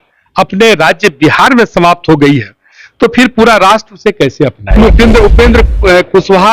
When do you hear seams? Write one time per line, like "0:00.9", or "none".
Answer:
0:04.7